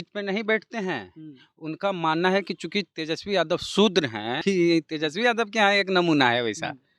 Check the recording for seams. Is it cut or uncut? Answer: cut